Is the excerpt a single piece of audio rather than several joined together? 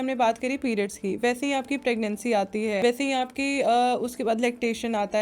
no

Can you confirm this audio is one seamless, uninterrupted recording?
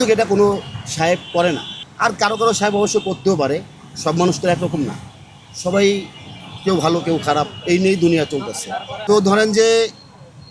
yes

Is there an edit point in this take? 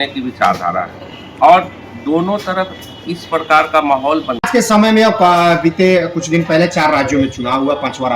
yes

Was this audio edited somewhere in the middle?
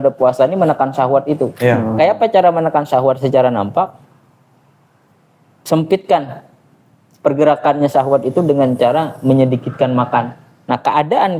no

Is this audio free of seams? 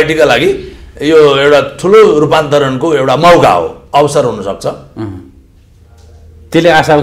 yes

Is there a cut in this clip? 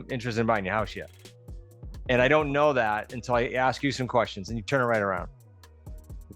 no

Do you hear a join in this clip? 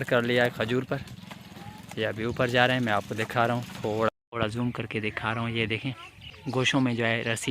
yes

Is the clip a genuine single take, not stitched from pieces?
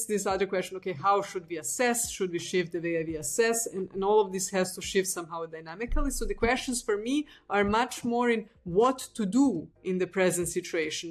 yes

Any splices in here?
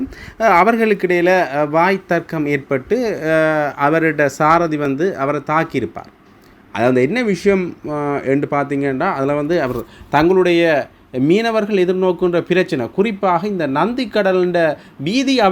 no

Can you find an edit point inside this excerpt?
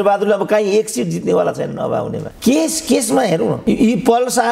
yes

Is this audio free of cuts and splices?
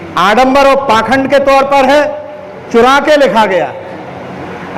yes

